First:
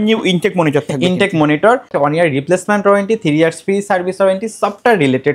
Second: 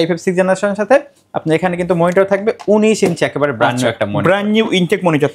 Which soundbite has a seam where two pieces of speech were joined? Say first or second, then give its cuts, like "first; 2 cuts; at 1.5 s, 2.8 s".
first; 1 cut; at 1.9 s